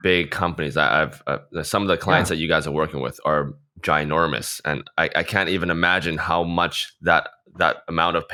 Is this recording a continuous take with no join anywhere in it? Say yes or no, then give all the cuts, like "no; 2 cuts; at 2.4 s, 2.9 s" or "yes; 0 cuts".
yes; 0 cuts